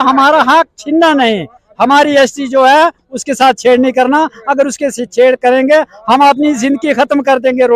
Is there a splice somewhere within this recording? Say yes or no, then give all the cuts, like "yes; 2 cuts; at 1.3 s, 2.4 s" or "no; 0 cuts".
no; 0 cuts